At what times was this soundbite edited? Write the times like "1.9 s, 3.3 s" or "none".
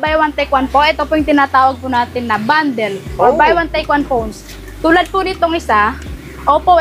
none